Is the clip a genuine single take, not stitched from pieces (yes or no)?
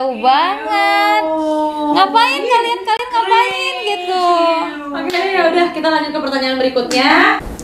yes